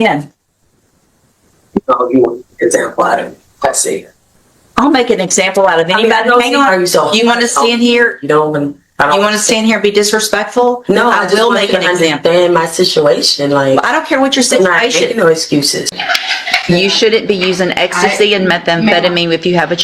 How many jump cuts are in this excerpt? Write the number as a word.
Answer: one